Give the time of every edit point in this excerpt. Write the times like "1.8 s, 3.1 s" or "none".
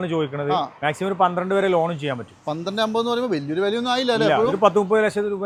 none